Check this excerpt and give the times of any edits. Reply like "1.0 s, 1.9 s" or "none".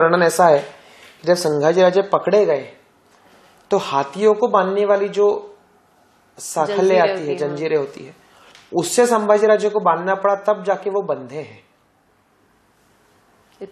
none